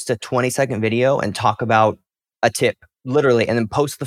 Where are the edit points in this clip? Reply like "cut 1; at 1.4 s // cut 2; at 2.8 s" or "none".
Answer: cut 1; at 2.4 s